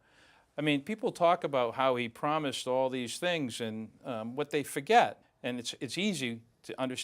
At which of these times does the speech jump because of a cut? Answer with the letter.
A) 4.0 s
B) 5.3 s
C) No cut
B